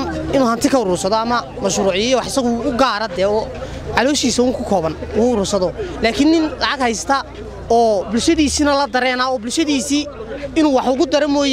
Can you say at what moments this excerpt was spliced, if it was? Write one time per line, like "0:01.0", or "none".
none